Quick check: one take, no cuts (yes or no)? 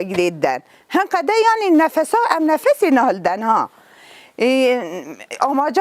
yes